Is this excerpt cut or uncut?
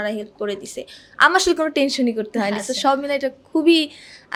uncut